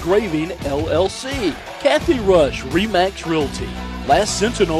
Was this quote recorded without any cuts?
no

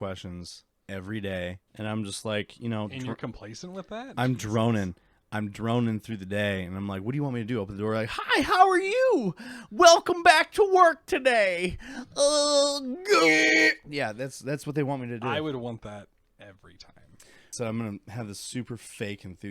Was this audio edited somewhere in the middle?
yes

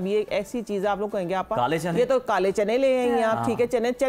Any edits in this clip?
no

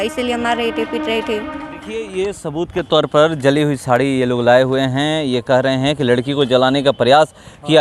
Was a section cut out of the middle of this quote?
yes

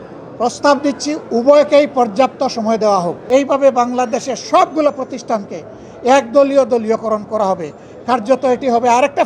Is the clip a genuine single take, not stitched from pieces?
no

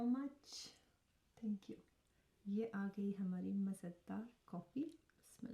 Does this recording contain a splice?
no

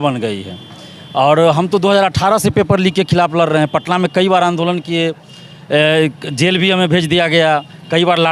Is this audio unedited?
yes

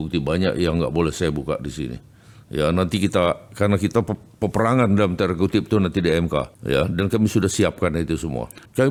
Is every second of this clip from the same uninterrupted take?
yes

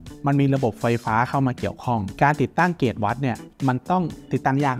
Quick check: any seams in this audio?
no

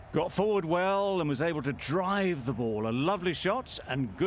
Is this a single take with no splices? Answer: no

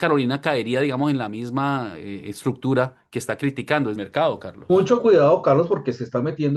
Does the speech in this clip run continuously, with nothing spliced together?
no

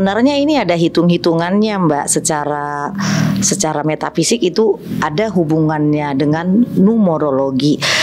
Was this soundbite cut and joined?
no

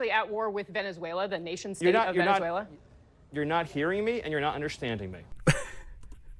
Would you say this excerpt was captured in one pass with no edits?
yes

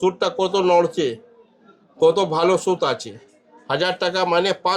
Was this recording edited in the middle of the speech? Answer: no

